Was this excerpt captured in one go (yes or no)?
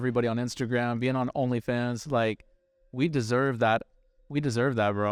yes